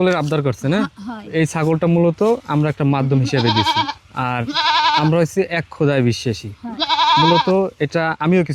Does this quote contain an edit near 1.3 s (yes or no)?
yes